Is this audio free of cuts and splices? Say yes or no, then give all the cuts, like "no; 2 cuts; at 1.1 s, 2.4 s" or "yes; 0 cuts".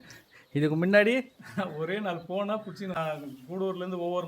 no; 1 cut; at 3.0 s